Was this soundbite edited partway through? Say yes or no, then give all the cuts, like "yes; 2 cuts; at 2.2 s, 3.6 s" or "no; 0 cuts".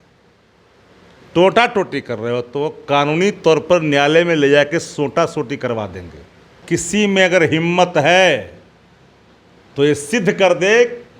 yes; 1 cut; at 6.6 s